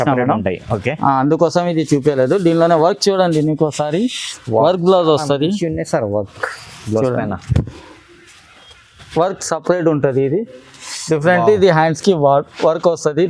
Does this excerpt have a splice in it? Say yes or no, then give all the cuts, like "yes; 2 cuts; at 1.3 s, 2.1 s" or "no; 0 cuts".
no; 0 cuts